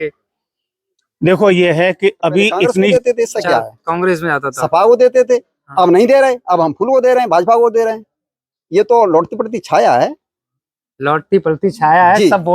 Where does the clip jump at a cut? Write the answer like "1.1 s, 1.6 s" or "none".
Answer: 2.9 s